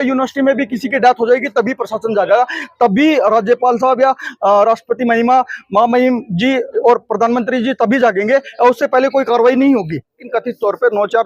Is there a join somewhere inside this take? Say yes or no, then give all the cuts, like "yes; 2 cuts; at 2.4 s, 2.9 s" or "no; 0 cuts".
yes; 1 cut; at 10.2 s